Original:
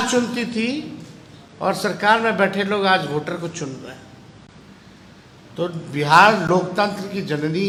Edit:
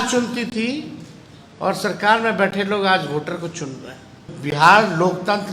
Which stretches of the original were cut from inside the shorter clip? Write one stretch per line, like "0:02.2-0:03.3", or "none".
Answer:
0:04.3-0:05.8